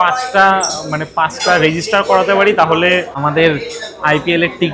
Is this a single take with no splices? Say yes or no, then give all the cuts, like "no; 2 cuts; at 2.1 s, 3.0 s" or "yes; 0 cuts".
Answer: no; 1 cut; at 3.2 s